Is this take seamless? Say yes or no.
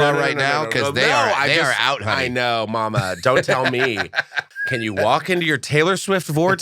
no